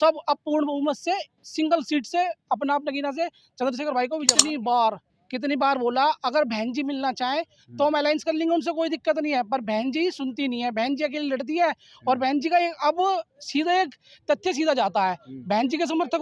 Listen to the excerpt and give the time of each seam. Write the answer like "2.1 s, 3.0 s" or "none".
4.4 s